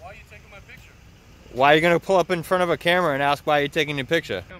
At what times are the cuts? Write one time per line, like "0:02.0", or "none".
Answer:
none